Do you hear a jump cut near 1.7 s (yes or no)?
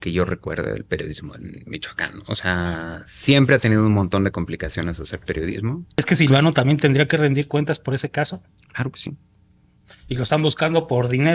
no